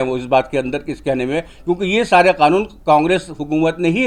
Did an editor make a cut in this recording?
no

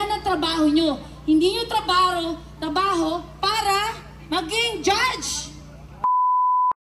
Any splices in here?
yes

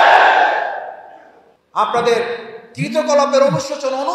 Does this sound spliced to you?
yes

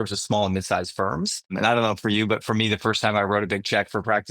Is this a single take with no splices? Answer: no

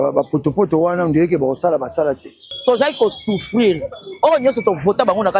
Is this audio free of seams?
no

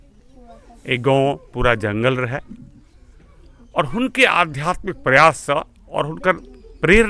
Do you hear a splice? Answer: no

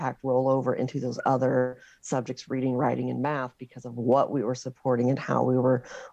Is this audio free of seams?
yes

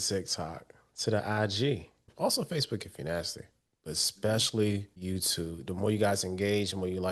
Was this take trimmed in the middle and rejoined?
yes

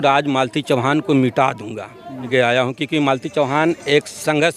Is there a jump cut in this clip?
yes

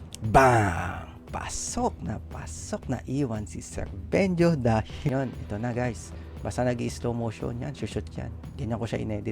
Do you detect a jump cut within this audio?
yes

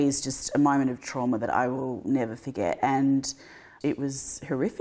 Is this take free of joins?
yes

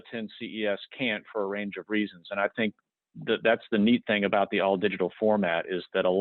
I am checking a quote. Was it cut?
no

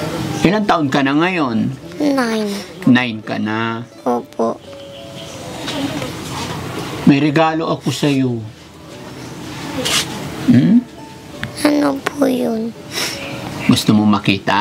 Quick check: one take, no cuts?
yes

